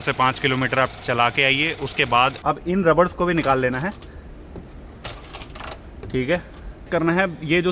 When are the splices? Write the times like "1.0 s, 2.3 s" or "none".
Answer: 2.4 s, 6.8 s

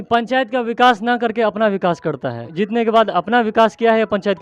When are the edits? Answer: 2.5 s

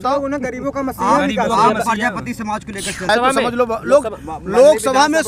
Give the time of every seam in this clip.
3.1 s

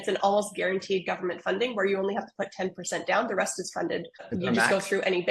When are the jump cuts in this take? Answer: 4.3 s

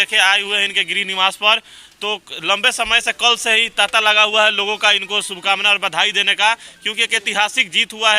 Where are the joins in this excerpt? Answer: none

